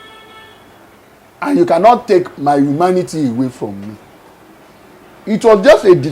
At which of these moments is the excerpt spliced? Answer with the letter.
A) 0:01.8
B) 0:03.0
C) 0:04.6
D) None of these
C